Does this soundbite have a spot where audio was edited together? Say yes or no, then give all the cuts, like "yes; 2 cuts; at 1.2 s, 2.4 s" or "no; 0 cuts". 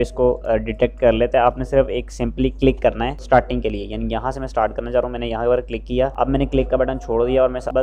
no; 0 cuts